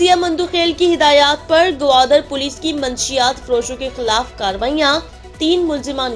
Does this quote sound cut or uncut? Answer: uncut